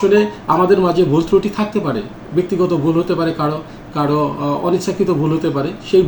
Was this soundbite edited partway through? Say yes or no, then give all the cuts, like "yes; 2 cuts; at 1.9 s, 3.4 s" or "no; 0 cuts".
no; 0 cuts